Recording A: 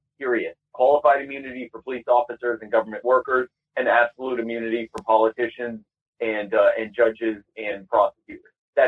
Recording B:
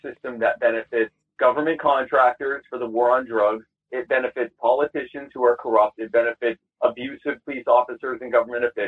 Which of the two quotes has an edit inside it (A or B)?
B